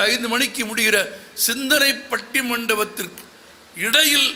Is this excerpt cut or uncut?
uncut